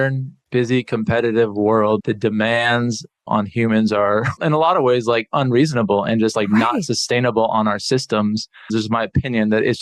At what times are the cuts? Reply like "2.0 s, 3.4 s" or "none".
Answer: 2.0 s, 3.2 s, 4.3 s, 8.7 s